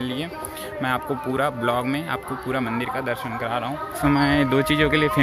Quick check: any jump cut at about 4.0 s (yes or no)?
yes